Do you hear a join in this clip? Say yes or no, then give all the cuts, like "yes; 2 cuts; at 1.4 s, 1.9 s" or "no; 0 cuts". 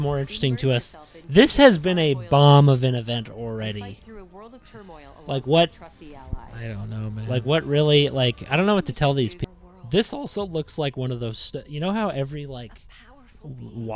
yes; 1 cut; at 9.4 s